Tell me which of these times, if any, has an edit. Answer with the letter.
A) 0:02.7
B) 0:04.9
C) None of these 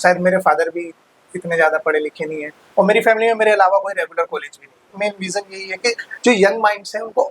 B